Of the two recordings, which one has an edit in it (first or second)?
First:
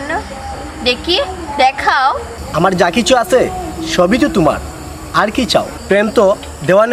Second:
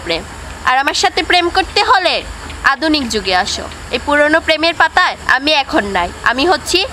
first